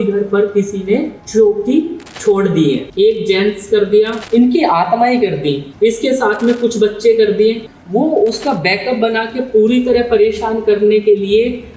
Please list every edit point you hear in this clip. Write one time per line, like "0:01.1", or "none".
0:01.2
0:02.0
0:02.9
0:04.2
0:05.7
0:07.7